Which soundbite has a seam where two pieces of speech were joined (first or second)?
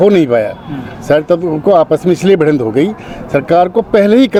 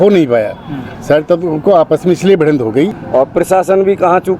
second